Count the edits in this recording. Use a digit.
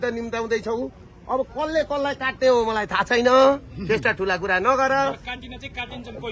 0